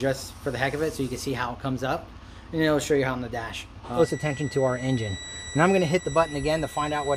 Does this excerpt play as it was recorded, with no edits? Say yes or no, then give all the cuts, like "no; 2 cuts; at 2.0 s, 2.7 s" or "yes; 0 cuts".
no; 1 cut; at 3.9 s